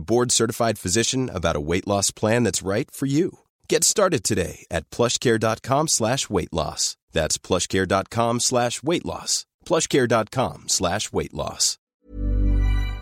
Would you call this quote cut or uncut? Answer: cut